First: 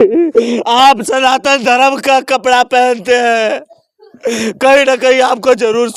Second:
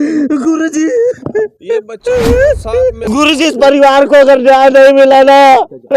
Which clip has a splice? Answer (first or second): second